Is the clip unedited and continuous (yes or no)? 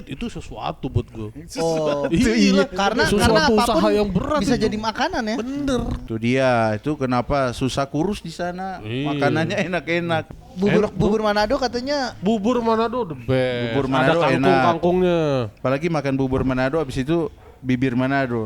no